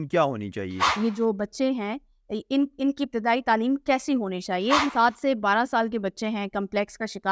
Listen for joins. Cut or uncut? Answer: cut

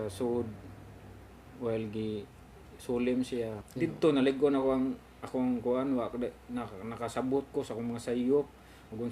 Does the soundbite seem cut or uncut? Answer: cut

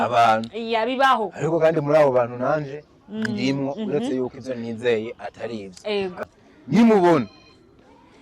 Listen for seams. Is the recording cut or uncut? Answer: cut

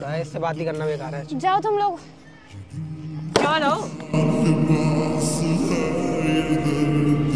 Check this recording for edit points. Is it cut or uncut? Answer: uncut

